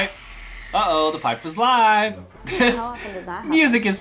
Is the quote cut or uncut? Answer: cut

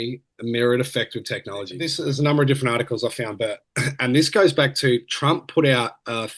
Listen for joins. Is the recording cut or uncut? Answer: cut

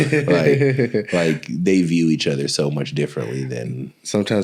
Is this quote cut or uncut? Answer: uncut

